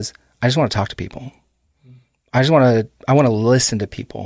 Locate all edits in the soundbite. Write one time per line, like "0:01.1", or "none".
none